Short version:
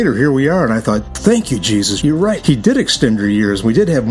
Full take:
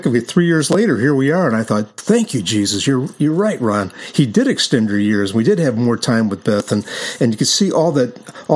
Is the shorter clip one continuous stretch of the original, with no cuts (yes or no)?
no